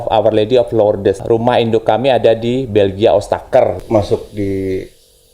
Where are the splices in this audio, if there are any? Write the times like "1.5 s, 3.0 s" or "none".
1.2 s, 3.8 s

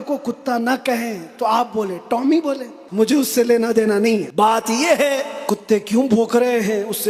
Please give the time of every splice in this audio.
2.7 s, 4.3 s, 5.3 s

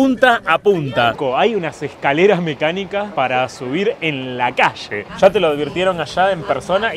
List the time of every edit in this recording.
1.1 s, 4.9 s

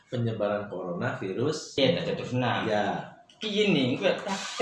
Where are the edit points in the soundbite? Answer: 1.8 s

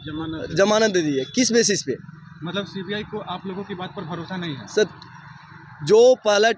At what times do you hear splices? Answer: none

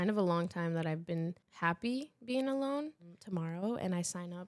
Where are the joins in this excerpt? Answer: 1.4 s, 3.2 s

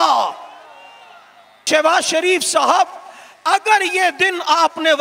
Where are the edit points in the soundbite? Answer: 1.6 s

